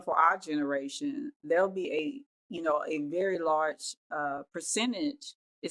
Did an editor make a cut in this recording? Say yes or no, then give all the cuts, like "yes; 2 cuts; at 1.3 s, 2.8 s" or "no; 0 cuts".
no; 0 cuts